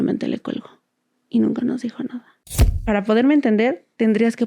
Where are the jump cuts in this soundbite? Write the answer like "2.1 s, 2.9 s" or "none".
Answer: 2.8 s